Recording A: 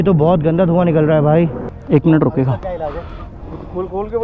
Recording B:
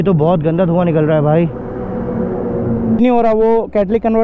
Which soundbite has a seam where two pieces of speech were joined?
A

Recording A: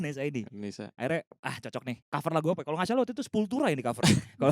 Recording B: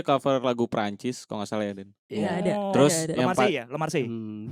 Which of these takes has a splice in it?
A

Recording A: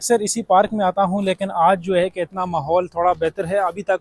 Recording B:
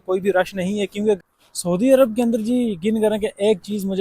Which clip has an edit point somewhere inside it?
B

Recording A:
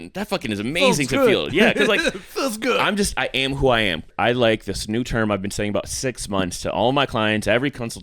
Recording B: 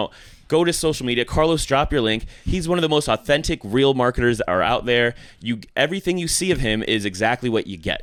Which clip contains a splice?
A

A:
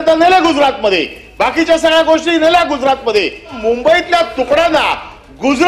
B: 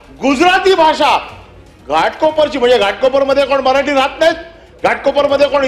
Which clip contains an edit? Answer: A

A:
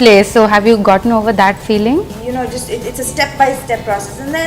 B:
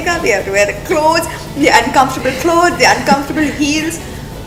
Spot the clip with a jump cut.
A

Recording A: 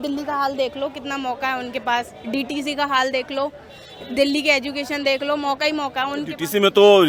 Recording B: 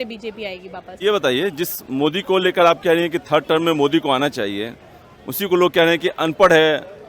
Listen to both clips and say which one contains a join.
B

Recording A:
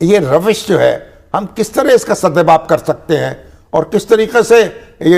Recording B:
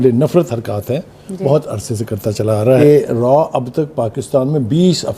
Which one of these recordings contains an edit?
B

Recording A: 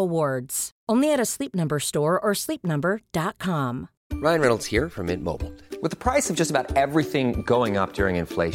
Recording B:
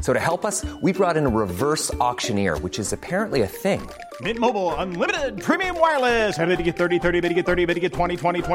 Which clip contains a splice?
A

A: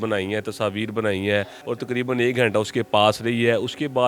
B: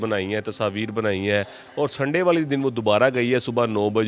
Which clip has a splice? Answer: A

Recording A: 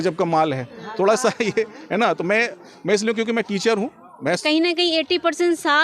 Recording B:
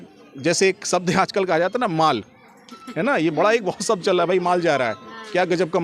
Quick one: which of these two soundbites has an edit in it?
A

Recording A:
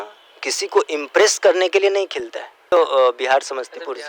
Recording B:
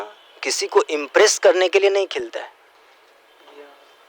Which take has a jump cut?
A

